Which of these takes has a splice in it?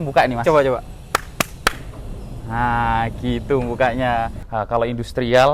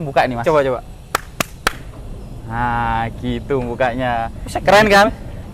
first; 1 cut; at 4.4 s

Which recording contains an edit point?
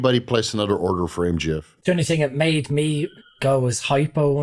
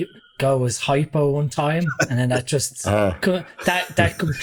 first; 1 cut; at 1.7 s

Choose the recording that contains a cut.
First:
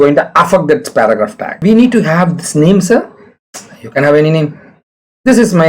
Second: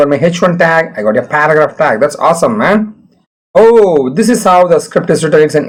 first; 1 cut; at 1.6 s

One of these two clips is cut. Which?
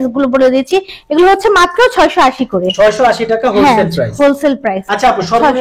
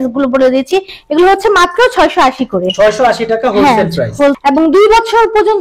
second; 1 cut; at 4.4 s

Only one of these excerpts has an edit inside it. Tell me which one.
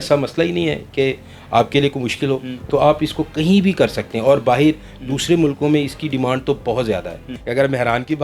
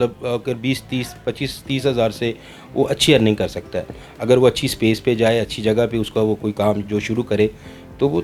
first; 1 cut; at 7.3 s

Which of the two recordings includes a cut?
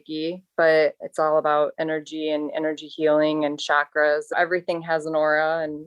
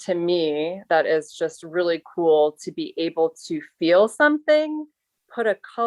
first; 2 cuts; at 1.0 s, 4.3 s

